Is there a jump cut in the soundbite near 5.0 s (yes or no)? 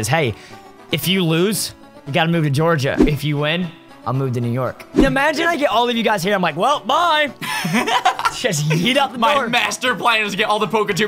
yes